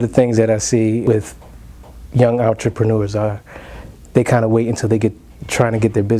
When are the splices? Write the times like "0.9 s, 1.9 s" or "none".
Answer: 1.0 s